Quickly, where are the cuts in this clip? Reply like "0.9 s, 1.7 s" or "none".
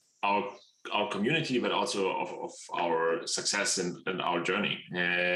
none